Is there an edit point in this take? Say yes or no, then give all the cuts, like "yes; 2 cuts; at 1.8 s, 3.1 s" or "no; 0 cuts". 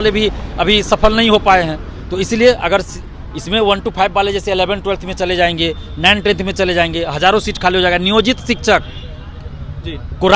no; 0 cuts